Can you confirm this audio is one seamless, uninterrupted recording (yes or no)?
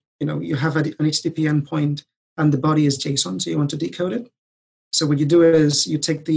yes